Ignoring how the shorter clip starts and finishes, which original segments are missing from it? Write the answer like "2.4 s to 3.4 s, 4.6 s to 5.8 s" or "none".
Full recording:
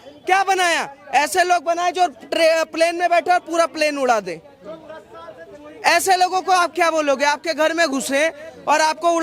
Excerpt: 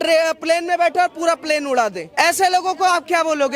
4.3 s to 5.7 s